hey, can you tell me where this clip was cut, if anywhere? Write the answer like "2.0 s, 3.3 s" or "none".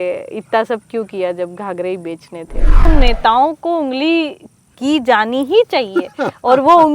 2.9 s

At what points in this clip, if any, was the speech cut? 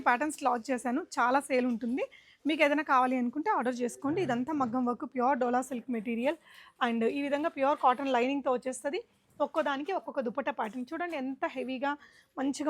none

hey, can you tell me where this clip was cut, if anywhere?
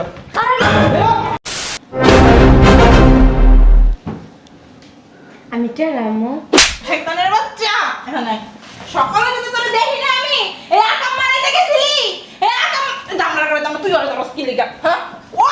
1.4 s

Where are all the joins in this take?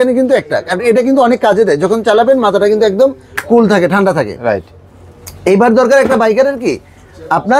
none

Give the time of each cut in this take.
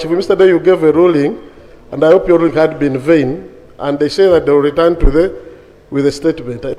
none

